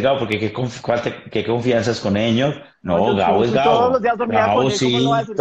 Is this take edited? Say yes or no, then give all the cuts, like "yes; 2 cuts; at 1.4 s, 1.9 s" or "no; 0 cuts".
no; 0 cuts